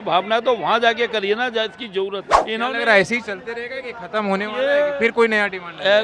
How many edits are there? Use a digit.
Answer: 1